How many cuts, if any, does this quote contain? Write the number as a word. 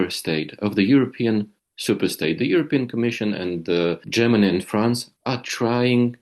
one